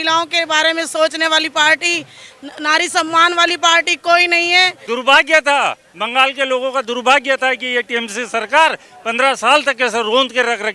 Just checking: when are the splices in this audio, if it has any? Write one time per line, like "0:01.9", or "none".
0:04.8